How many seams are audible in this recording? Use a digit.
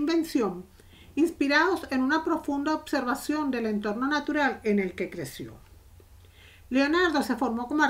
0